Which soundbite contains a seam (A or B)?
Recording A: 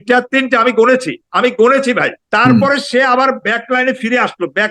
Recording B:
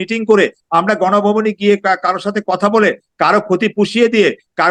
A